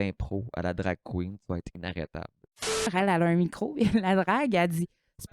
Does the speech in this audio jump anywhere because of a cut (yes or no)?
yes